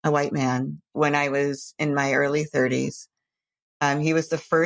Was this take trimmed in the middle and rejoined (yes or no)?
yes